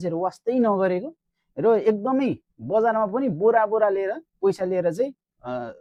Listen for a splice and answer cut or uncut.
uncut